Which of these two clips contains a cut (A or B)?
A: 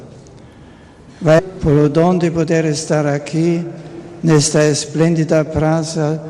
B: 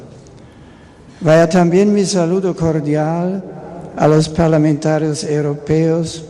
B